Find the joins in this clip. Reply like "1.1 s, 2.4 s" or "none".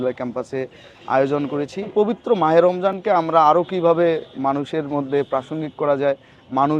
1.9 s